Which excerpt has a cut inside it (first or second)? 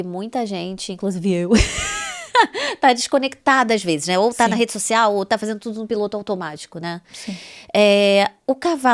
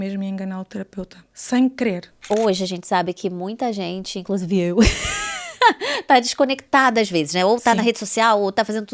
second